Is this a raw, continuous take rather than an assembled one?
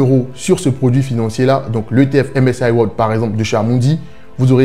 yes; 0 cuts

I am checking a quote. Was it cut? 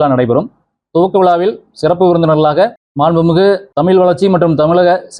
yes; 2 cuts; at 2.8 s, 3.7 s

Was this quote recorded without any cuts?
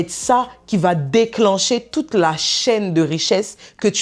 yes; 0 cuts

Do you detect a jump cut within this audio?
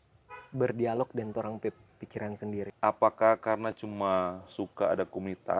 yes; 1 cut; at 2.7 s

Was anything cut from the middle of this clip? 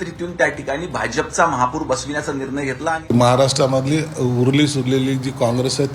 yes; 1 cut; at 3.1 s

